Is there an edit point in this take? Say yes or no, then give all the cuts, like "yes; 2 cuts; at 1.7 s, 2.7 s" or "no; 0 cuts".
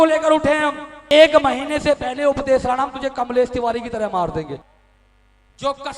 yes; 2 cuts; at 1.0 s, 4.7 s